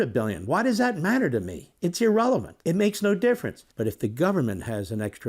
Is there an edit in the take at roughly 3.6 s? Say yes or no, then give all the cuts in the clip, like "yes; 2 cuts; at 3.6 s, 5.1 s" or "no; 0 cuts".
yes; 1 cut; at 3.6 s